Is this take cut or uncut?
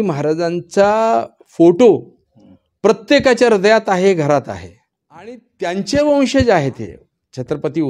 cut